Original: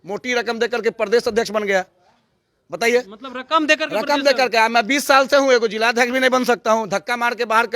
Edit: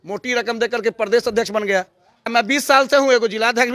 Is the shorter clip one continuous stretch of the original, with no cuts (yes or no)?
no